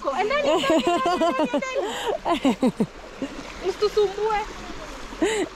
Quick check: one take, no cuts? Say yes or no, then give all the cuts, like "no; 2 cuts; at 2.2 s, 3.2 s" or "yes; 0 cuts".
yes; 0 cuts